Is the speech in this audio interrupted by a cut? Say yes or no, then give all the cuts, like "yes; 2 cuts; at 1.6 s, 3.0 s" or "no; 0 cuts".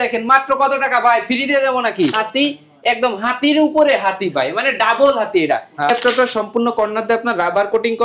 yes; 2 cuts; at 2.1 s, 5.9 s